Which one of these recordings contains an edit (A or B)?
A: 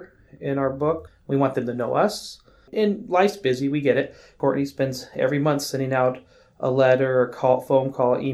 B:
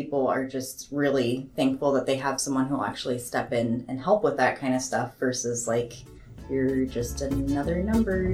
A